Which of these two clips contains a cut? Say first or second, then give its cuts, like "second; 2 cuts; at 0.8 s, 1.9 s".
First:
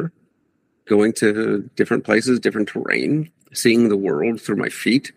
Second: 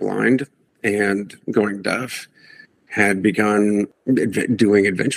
second; 1 cut; at 4.0 s